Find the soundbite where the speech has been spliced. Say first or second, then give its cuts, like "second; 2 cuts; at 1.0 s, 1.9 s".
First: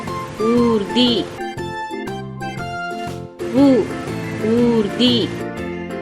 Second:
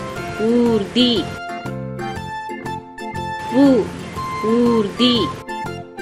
first; 3 cuts; at 1.3 s, 3.1 s, 5.3 s